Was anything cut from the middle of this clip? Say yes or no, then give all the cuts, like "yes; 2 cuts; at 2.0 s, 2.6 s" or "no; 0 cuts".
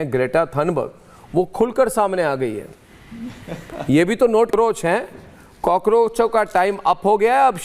yes; 1 cut; at 4.5 s